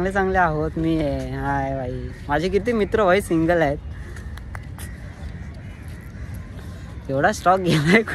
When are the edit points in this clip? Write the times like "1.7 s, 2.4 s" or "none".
none